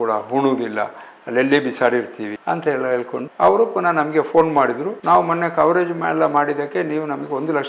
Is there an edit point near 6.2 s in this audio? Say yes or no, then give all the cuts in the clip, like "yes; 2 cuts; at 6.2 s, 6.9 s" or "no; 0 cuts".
no; 2 cuts; at 2.3 s, 3.3 s